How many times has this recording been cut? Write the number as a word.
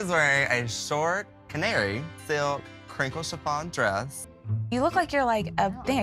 one